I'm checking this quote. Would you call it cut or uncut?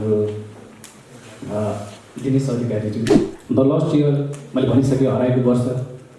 cut